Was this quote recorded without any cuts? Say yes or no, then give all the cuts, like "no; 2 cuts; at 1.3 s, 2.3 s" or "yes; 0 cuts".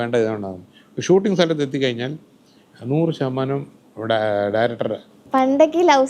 no; 1 cut; at 5.1 s